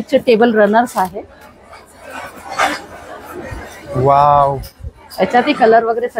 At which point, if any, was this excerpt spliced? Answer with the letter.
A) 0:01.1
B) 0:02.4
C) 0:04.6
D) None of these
D